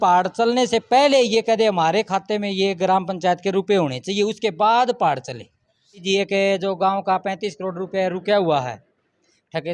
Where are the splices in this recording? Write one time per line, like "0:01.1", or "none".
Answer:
0:06.0

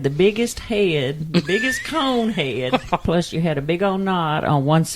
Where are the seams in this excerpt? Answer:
0:03.0

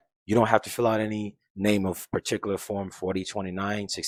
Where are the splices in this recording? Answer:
none

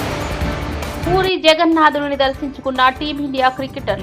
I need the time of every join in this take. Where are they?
0:01.0

